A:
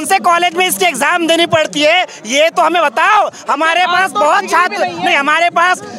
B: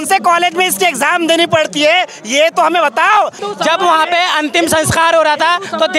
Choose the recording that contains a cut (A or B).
B